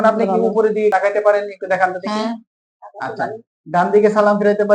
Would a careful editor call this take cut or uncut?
cut